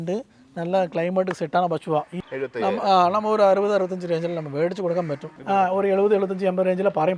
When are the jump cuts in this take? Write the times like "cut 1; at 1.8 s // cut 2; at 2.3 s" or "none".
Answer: cut 1; at 2.2 s // cut 2; at 5.3 s